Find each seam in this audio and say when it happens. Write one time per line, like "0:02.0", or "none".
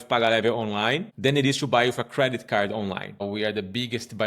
0:01.1
0:03.1